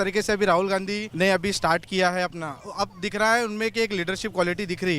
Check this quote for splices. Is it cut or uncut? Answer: cut